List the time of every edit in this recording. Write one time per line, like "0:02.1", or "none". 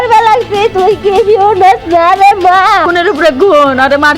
0:02.9